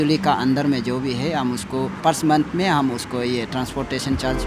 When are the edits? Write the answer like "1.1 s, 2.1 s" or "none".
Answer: 2.0 s